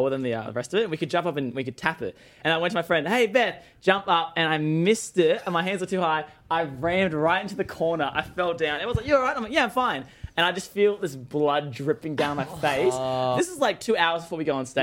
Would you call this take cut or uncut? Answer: cut